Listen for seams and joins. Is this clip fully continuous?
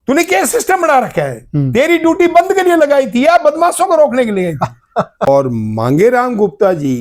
no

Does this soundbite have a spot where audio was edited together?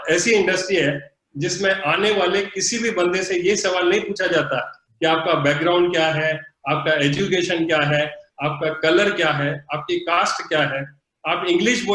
no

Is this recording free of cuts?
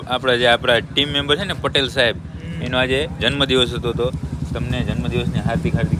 yes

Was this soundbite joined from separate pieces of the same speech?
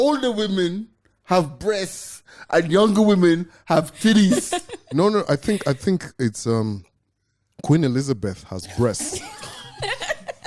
no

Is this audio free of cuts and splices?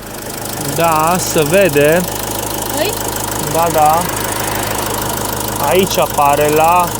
yes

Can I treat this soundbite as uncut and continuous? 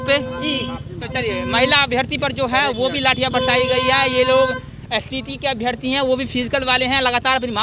yes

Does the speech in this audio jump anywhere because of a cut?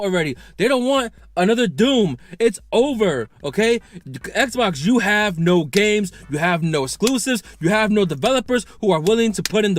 yes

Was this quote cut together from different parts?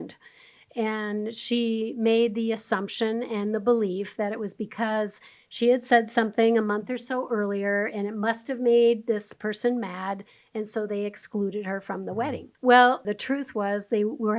yes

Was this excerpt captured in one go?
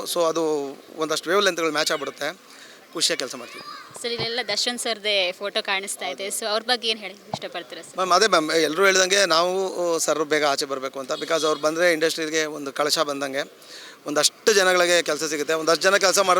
yes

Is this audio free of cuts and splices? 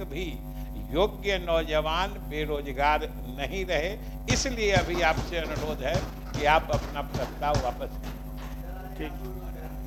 yes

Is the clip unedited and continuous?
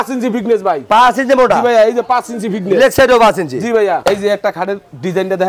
no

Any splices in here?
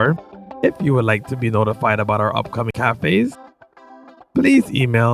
yes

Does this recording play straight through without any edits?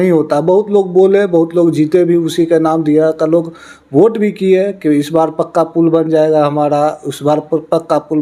yes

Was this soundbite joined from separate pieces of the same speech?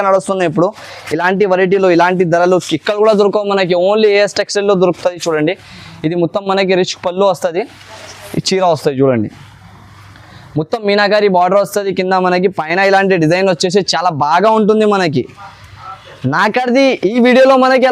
no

